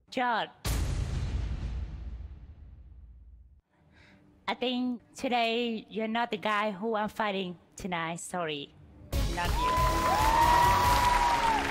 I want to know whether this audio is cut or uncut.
uncut